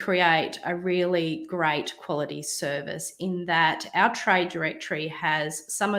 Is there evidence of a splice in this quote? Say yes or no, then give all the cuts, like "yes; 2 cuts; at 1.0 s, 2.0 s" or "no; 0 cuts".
no; 0 cuts